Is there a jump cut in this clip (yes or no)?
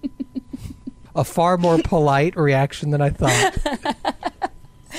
yes